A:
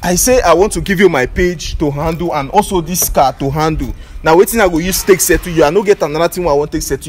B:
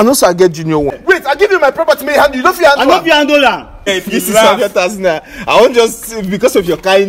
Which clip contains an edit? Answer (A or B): B